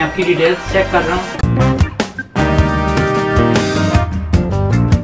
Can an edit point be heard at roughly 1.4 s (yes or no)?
yes